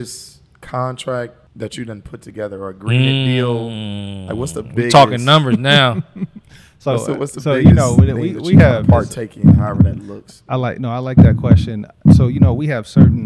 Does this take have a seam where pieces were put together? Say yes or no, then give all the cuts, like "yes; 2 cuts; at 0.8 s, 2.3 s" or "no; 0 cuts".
yes; 1 cut; at 1.4 s